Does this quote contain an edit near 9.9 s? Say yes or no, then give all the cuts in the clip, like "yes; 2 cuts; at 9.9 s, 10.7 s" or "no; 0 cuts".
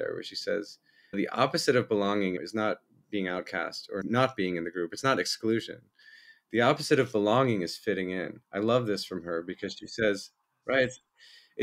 no; 3 cuts; at 1.1 s, 2.4 s, 4.0 s